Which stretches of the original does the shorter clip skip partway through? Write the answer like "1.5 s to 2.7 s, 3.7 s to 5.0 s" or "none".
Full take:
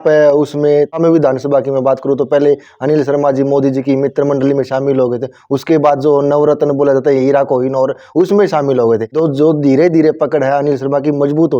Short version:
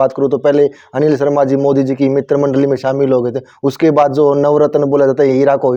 none